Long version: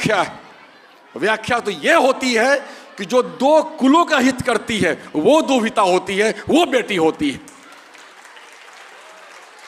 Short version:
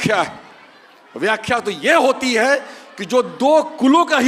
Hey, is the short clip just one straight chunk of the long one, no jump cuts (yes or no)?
yes